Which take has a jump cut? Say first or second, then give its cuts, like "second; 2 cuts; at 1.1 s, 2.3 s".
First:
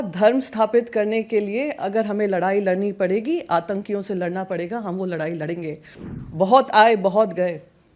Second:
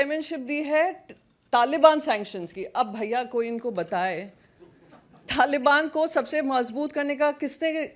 first; 1 cut; at 5.9 s